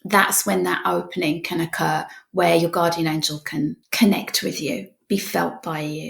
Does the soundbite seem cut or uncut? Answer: cut